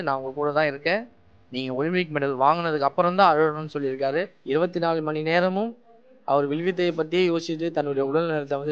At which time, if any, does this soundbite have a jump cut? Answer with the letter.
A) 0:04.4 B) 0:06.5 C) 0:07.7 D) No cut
A